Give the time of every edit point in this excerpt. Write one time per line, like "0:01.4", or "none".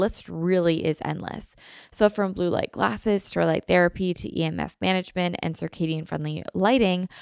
none